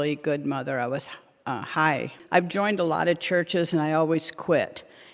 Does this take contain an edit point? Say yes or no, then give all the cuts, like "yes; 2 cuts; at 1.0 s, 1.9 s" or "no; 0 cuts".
yes; 1 cut; at 2.2 s